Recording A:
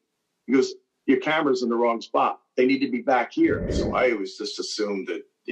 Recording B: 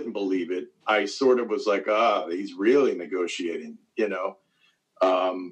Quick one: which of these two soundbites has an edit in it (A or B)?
A